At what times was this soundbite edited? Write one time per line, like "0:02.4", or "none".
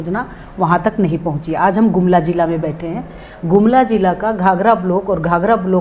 none